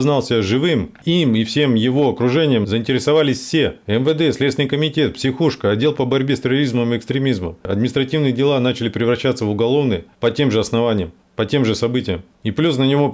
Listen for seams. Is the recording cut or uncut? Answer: cut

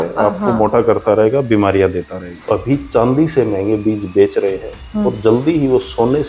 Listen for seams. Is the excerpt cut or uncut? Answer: cut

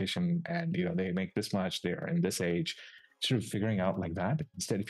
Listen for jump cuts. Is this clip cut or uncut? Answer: uncut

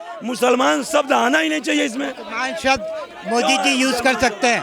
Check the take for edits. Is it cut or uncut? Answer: uncut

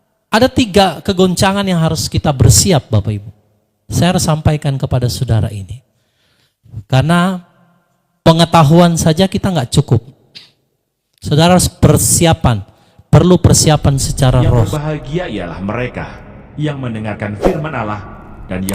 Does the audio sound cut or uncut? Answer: cut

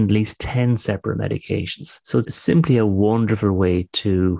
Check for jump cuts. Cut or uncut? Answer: cut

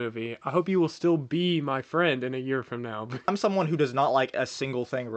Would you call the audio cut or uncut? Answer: cut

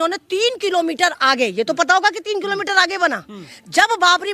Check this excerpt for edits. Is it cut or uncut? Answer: uncut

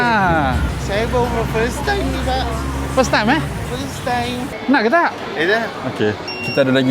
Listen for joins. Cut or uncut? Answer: cut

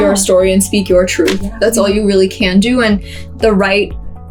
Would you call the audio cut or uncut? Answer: uncut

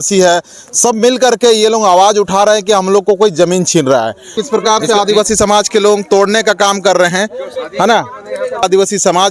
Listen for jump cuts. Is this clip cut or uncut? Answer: cut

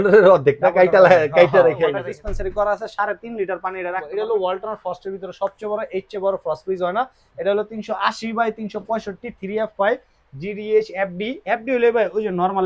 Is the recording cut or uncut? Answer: cut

